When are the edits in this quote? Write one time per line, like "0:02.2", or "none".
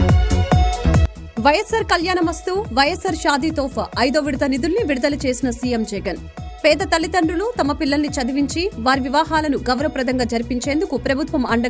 0:00.9